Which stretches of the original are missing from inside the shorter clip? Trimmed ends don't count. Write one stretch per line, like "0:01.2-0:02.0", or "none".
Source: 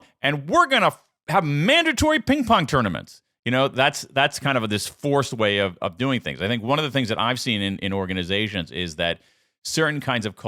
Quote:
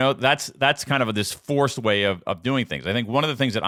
none